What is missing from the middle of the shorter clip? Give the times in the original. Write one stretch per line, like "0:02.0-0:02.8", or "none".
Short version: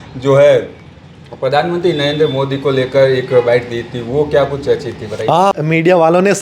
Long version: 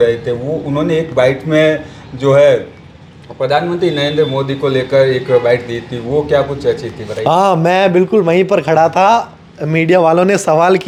0:07.5-0:09.5